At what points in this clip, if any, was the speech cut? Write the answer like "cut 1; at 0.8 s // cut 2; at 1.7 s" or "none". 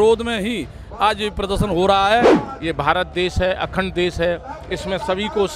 cut 1; at 2.4 s